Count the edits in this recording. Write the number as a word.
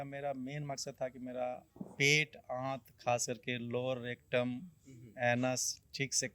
one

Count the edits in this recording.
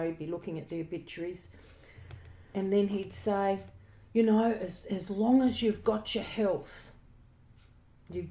one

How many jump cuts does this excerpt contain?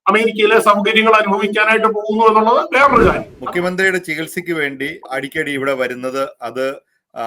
two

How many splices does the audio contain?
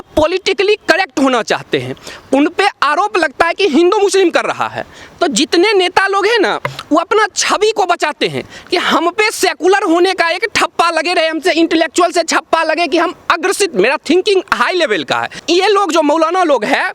one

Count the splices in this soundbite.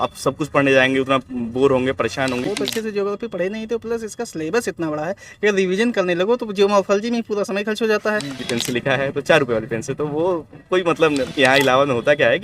three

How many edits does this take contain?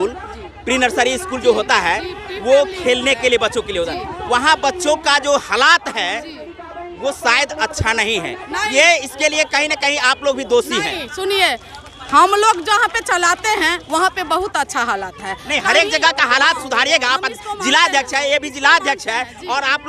zero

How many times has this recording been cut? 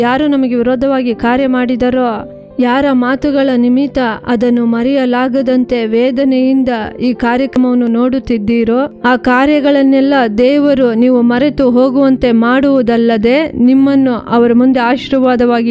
one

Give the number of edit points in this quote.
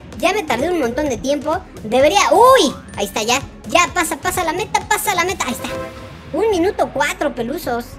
zero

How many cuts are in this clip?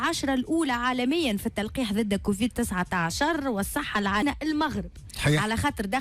one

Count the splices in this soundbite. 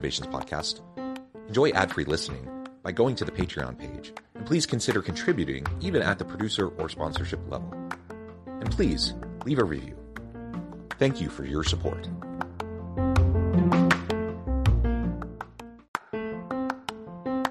one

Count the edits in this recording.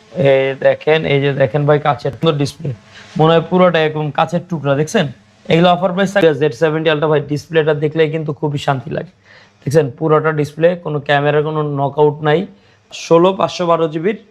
three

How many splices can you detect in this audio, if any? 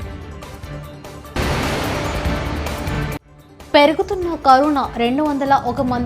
two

